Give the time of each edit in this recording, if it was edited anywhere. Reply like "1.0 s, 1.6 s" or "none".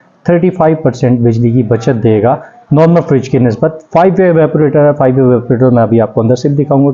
none